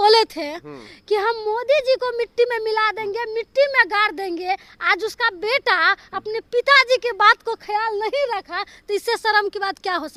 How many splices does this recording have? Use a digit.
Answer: 0